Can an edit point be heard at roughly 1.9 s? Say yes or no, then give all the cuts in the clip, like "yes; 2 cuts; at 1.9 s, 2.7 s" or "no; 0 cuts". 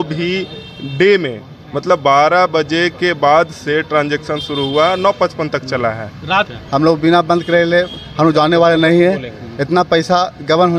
no; 1 cut; at 6.5 s